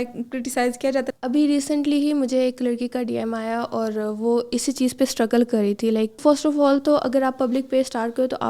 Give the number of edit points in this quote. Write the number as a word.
two